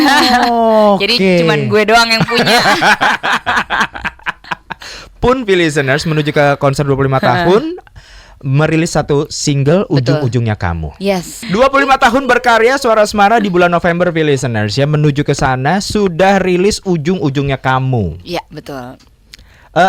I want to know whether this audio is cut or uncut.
uncut